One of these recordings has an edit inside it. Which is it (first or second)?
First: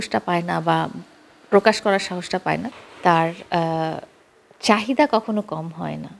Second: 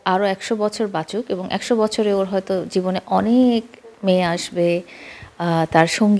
first